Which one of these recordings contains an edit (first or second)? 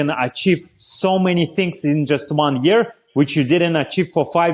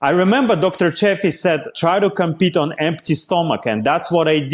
second